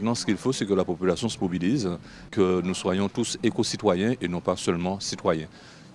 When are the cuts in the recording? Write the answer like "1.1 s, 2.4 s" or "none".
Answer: 2.2 s